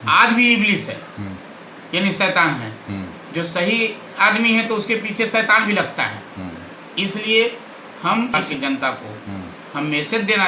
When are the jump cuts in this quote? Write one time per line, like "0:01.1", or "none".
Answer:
0:08.3